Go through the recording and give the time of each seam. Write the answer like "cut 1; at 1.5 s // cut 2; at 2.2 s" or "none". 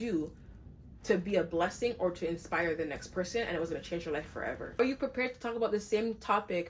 cut 1; at 4.8 s